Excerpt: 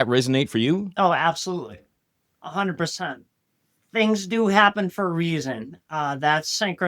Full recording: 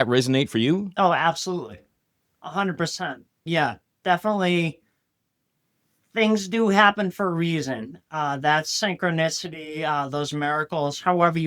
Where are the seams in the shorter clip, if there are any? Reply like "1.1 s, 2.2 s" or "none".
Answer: 3.3 s